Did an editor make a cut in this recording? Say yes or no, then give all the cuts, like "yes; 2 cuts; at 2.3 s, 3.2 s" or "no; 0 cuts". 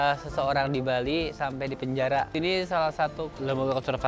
yes; 1 cut; at 2.3 s